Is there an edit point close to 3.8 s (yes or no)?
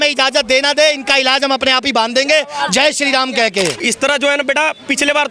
yes